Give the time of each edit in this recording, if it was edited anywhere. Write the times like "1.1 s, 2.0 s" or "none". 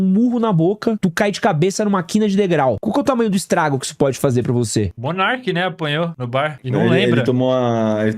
1.0 s, 2.8 s, 5.0 s, 6.4 s